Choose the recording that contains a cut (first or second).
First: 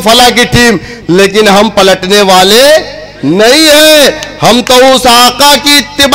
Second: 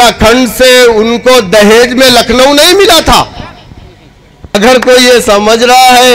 second